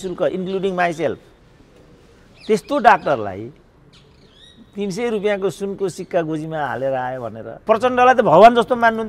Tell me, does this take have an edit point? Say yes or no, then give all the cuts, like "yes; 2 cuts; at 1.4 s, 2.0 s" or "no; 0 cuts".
yes; 1 cut; at 7.5 s